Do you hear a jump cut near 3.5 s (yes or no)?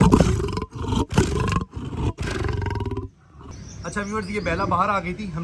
yes